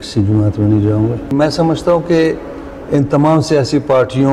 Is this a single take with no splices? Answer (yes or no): yes